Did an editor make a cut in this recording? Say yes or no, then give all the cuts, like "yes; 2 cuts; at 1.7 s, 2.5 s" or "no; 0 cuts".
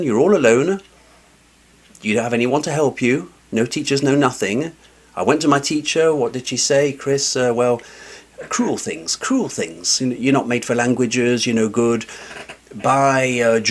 no; 0 cuts